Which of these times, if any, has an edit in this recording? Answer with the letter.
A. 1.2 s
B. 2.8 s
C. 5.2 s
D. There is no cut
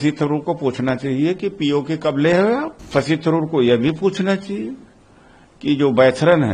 B